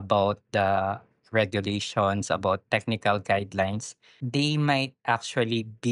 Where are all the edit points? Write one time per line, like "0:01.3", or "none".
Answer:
0:04.2